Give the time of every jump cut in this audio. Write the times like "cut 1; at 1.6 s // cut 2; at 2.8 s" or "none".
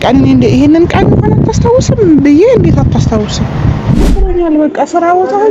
cut 1; at 4.2 s